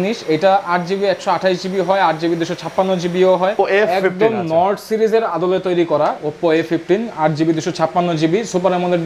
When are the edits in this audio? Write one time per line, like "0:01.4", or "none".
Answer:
0:03.5